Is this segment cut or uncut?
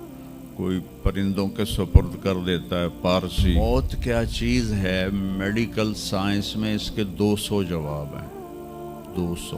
cut